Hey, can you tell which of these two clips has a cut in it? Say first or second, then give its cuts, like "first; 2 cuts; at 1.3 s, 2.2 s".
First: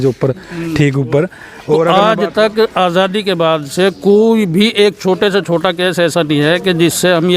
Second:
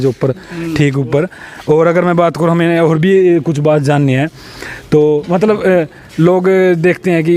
first; 1 cut; at 1.9 s